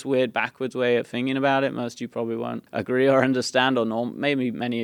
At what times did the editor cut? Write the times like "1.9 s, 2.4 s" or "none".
2.6 s